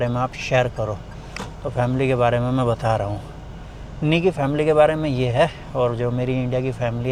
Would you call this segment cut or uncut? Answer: uncut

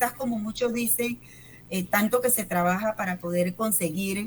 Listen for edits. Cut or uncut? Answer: uncut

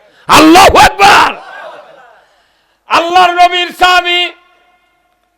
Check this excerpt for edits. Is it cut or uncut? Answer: uncut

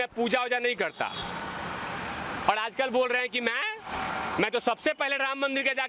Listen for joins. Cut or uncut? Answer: uncut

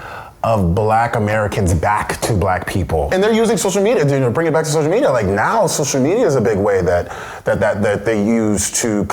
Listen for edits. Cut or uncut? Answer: cut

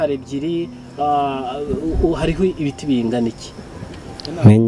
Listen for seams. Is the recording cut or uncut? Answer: uncut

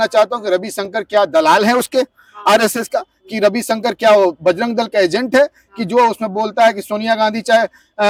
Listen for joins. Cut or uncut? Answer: uncut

